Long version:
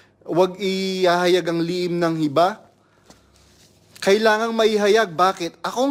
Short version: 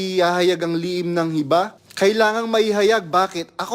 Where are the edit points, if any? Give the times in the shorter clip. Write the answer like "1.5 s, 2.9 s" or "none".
1.8 s